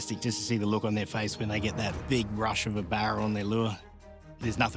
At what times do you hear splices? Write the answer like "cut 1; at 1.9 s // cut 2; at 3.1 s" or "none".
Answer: cut 1; at 3.8 s